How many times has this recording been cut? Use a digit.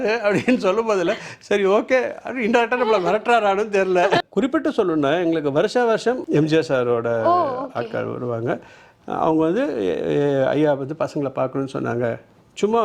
2